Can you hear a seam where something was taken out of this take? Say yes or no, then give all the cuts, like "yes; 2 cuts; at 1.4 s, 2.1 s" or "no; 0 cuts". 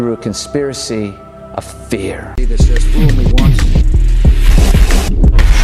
yes; 1 cut; at 2.3 s